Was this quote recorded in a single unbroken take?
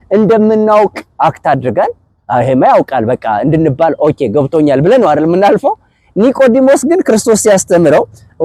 yes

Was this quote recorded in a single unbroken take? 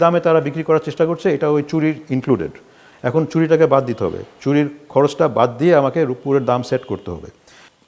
yes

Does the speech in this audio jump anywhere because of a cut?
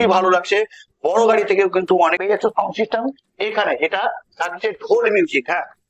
yes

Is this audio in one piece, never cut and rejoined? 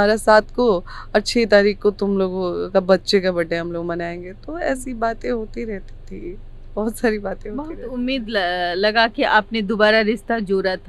yes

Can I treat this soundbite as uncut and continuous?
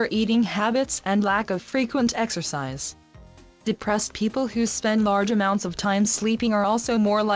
yes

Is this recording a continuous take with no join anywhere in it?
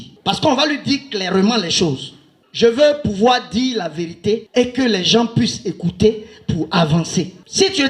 no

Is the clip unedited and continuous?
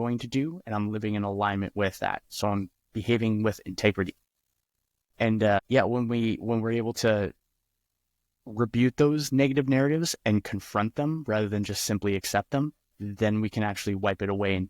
no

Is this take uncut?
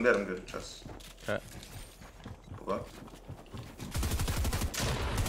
yes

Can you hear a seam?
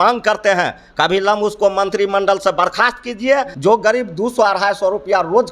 yes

